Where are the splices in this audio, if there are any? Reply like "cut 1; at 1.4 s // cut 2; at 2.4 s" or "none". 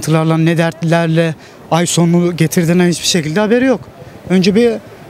none